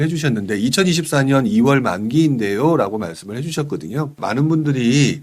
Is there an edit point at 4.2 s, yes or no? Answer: yes